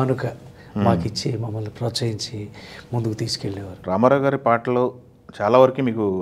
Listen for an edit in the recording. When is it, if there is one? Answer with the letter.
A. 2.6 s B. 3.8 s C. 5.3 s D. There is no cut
B